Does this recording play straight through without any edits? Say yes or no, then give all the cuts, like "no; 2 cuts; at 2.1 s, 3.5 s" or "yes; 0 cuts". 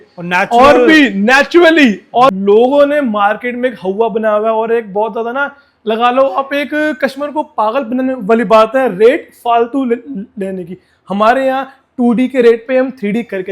no; 1 cut; at 2.3 s